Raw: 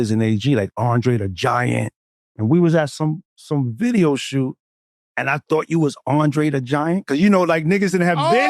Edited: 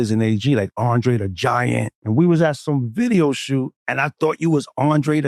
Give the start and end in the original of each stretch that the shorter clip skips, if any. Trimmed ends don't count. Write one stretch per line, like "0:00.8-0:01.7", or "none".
0:02.0-0:02.3
0:02.9-0:03.4
0:04.6-0:05.1